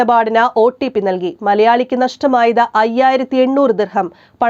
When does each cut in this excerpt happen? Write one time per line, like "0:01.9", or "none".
none